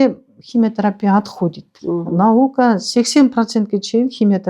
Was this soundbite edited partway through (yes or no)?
yes